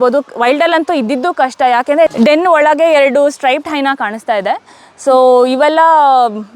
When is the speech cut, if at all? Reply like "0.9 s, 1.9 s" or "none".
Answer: 2.1 s